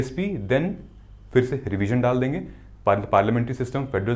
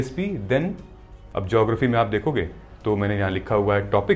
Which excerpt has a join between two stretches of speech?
second; 1 cut; at 1.1 s

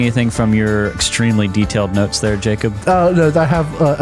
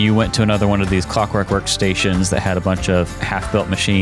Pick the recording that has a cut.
first; 2 cuts; at 1.0 s, 2.8 s

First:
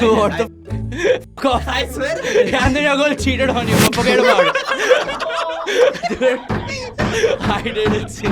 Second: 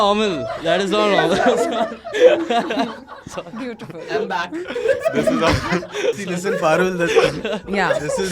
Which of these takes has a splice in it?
second; 1 cut; at 6.2 s

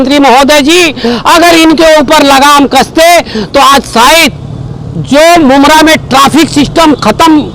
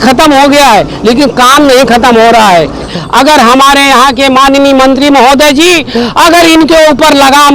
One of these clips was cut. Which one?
second; 1 cut; at 2.9 s

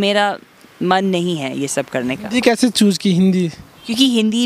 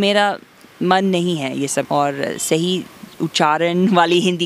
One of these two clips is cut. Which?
second; 1 cut; at 1.9 s

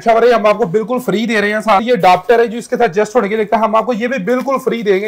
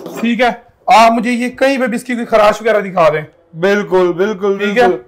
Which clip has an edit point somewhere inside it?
first; 1 cut; at 1.8 s

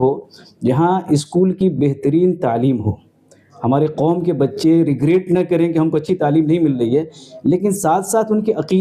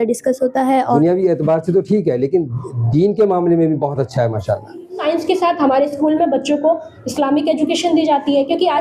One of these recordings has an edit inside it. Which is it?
second; 2 cuts; at 0.8 s, 5.0 s

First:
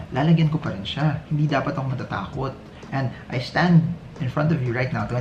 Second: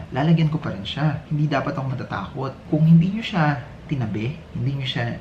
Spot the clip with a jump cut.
second; 1 cut; at 2.6 s

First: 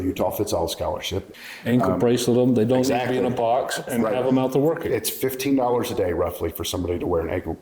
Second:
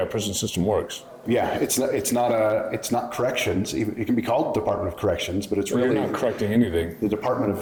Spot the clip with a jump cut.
first; 1 cut; at 1.3 s

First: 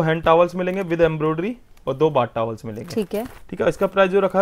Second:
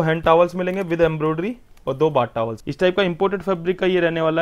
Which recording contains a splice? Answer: second; 1 cut; at 2.6 s

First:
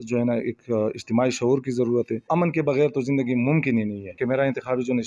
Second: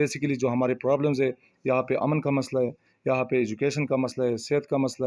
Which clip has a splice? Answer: first; 2 cuts; at 2.3 s, 4.0 s

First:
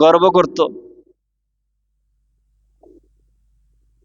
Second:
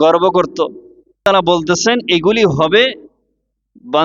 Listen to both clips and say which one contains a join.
second; 1 cut; at 1.2 s

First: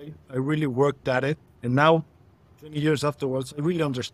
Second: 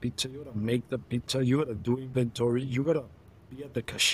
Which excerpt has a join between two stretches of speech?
first; 1 cut; at 1.5 s

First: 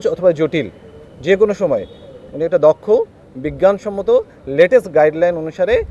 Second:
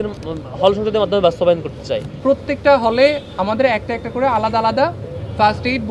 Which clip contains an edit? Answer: second; 1 cut; at 2.1 s

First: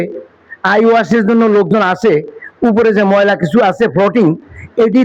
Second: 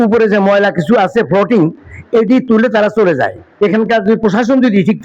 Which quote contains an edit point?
second; 1 cut; at 3.4 s

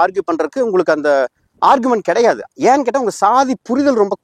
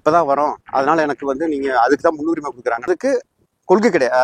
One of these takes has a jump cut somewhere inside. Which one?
second; 1 cut; at 2.9 s

